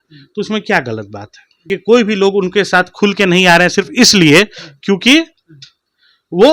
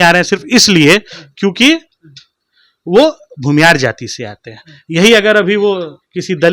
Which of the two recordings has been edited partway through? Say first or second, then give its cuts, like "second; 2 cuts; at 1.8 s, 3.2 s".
first; 1 cut; at 1.6 s